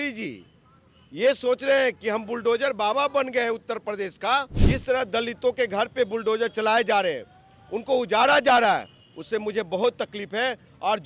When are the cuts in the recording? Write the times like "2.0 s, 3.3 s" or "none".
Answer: 4.6 s